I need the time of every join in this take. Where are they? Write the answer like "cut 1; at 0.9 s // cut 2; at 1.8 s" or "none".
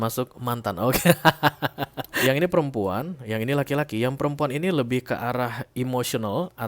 cut 1; at 2.0 s